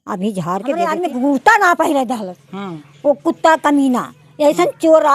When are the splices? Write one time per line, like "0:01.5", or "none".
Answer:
0:00.9